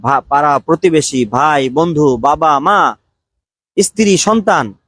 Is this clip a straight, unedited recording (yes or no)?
yes